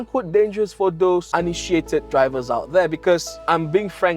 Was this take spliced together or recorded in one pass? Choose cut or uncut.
uncut